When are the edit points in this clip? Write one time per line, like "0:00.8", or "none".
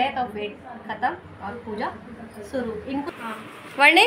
0:03.1